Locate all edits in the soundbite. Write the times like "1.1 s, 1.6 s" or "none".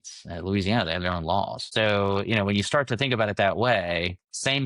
1.6 s